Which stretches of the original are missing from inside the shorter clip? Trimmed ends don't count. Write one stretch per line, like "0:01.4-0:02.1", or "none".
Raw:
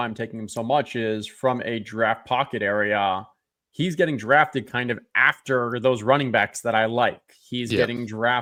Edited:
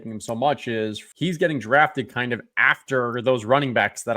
0:01.3-0:03.6